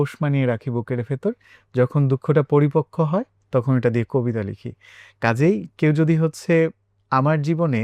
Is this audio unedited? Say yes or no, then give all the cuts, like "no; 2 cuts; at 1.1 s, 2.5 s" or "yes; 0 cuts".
yes; 0 cuts